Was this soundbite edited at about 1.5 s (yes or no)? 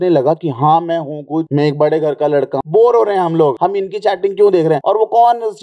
yes